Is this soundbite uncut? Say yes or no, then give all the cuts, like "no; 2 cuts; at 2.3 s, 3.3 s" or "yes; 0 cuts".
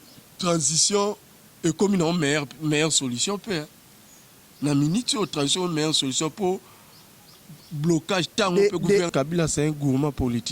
no; 1 cut; at 9.1 s